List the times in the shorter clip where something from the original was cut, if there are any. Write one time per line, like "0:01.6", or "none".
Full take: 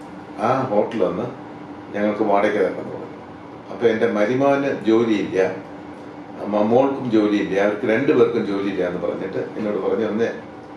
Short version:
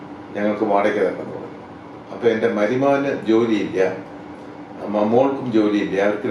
none